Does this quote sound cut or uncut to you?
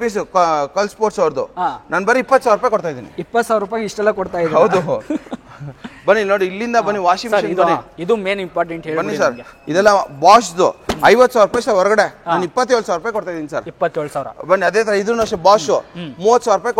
uncut